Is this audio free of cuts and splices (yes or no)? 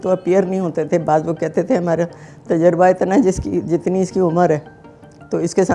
yes